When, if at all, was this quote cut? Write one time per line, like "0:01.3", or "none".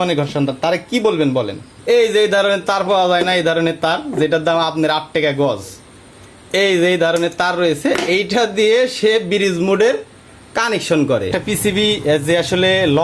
0:01.7
0:11.3